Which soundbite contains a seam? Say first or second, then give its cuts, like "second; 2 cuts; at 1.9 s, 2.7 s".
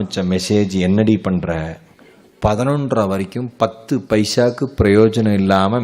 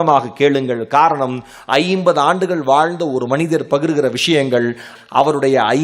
second; 1 cut; at 4.9 s